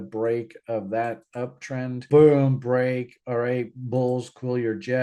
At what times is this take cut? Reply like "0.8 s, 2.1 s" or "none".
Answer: 2.0 s